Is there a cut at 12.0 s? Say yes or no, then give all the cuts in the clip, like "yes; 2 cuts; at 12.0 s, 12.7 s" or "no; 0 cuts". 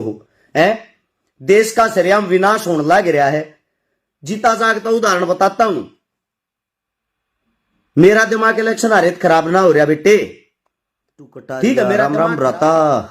yes; 1 cut; at 12.0 s